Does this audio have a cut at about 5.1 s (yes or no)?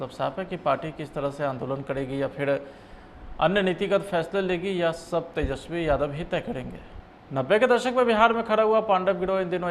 no